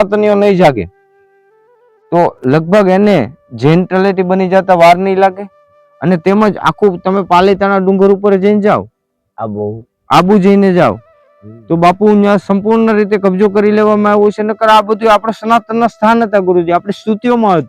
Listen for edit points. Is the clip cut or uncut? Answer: uncut